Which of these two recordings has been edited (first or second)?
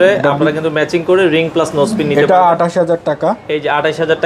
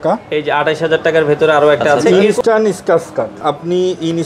second